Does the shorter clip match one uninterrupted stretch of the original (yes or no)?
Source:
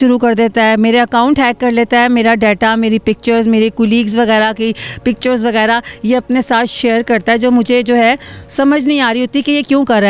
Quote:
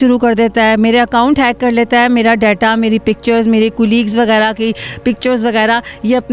yes